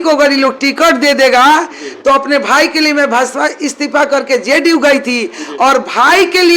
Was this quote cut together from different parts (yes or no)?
no